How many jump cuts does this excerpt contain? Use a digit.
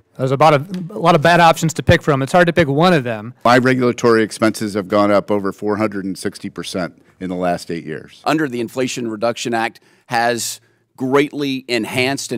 2